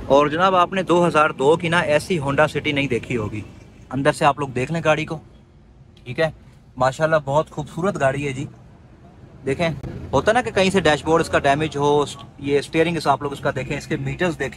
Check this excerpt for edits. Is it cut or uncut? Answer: uncut